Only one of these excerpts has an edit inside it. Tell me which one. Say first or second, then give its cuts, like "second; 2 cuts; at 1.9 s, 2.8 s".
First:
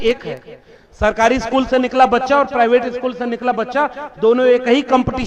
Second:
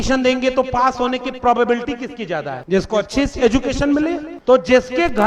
second; 2 cuts; at 2.5 s, 4.3 s